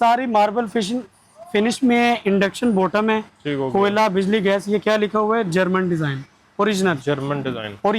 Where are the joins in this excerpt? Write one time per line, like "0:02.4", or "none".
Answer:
none